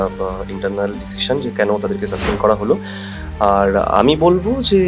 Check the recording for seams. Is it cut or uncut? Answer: uncut